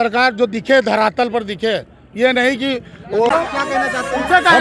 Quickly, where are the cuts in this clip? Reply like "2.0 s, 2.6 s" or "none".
3.3 s